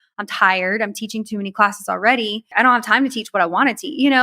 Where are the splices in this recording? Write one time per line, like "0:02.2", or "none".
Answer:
0:02.5

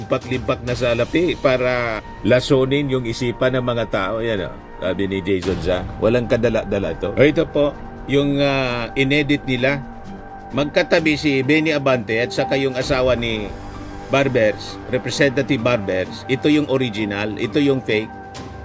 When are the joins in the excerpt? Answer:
0:07.1

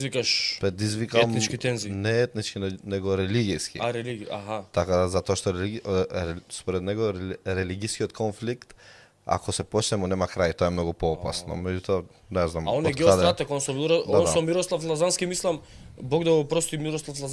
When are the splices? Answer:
none

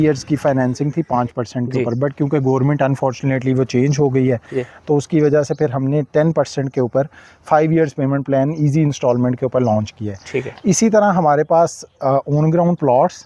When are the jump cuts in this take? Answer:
none

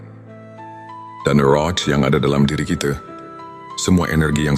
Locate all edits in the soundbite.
none

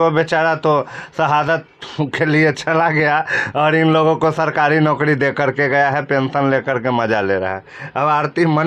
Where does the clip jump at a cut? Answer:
none

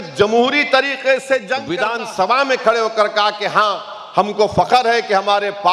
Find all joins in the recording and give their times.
0:01.7

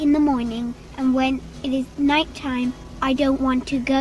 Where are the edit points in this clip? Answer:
0:01.9
0:02.9

